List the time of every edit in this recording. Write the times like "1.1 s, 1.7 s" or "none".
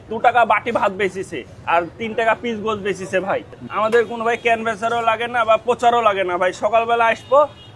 none